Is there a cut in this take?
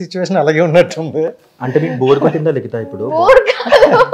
no; 0 cuts

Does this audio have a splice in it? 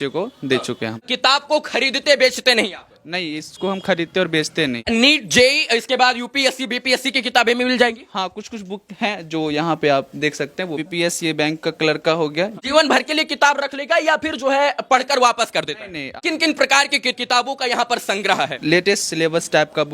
yes; 7 cuts; at 1.1 s, 4.8 s, 10.8 s, 12.5 s, 16.2 s, 17.2 s, 18.6 s

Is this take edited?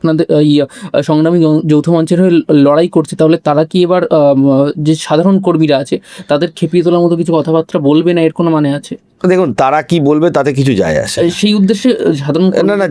no; 0 cuts

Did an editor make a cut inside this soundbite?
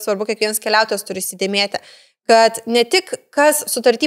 no; 0 cuts

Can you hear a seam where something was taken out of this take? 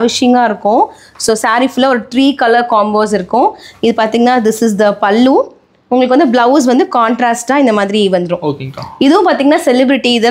no; 0 cuts

